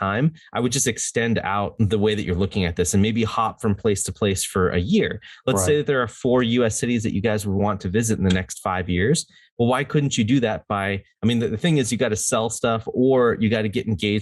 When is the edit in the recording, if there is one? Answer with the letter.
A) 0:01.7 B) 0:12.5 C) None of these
A